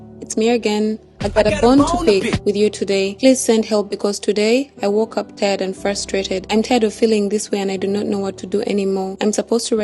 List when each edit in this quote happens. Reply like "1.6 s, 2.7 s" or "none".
none